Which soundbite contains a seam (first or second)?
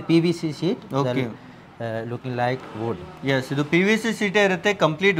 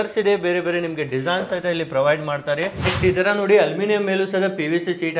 second